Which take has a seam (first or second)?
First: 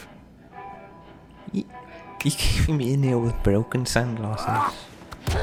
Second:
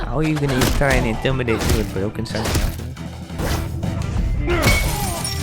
second